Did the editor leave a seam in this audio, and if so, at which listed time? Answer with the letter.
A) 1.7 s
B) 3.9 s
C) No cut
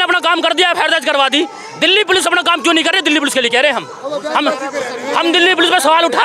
C